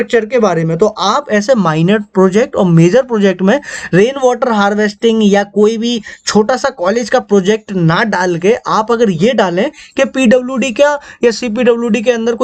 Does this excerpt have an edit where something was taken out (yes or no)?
no